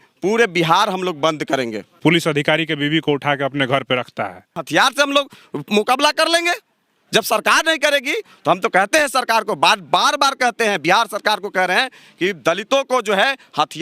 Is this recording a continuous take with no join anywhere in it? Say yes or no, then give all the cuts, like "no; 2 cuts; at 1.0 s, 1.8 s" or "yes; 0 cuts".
no; 2 cuts; at 2.0 s, 4.6 s